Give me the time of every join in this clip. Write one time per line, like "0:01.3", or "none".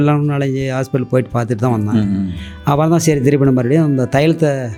none